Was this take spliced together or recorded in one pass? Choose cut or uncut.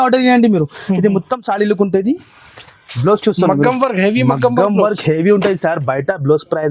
uncut